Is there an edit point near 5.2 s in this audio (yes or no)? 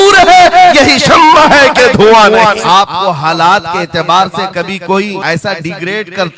yes